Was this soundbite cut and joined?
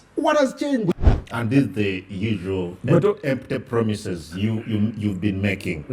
yes; 1 cut; at 0.9 s

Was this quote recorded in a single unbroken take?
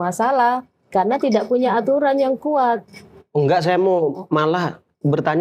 yes; 0 cuts

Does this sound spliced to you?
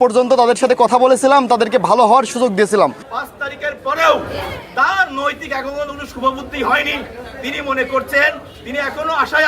yes; 1 cut; at 3.1 s

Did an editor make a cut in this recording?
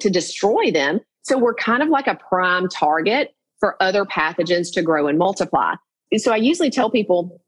yes; 1 cut; at 6.0 s

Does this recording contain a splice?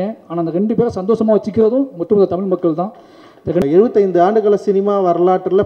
yes; 1 cut; at 3.6 s

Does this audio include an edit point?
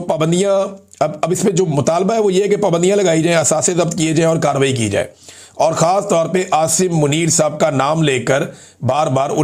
no; 0 cuts

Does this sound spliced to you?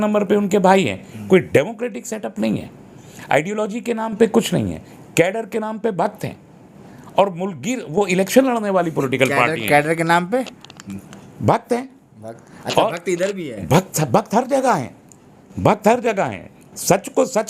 no; 0 cuts

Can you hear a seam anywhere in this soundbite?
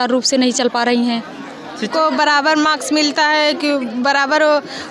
yes; 1 cut; at 1.9 s

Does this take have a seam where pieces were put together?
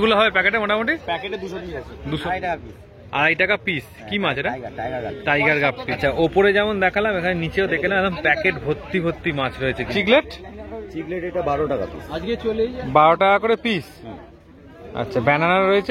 yes; 3 cuts; at 2.2 s, 5.9 s, 9.9 s

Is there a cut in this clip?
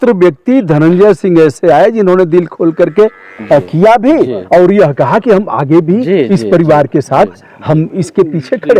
no; 0 cuts

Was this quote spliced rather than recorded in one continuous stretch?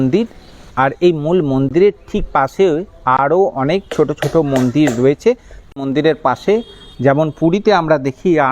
yes; 1 cut; at 5.5 s

